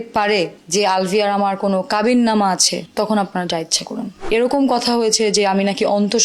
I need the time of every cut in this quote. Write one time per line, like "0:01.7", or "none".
none